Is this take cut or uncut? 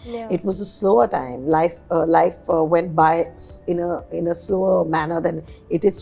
uncut